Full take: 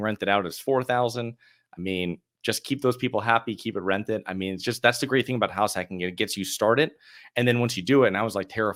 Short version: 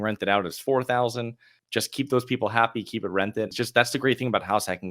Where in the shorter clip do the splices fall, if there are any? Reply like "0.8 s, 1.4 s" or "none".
1.5 s, 3.5 s